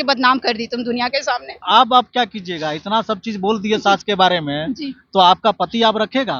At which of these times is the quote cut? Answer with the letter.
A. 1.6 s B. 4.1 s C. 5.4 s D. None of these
A